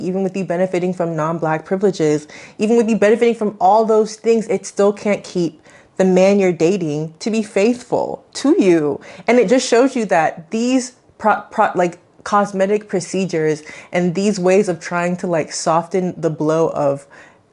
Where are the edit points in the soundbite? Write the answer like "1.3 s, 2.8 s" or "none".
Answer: none

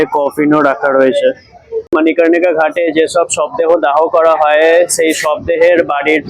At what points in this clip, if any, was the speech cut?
1.9 s

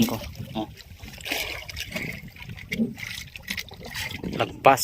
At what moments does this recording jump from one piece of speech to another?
1.8 s

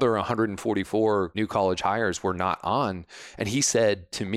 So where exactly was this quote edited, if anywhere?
1.3 s

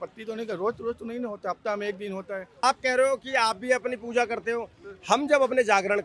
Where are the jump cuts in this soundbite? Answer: 2.6 s

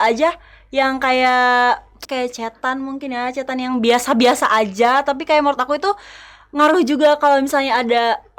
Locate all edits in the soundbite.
2.0 s

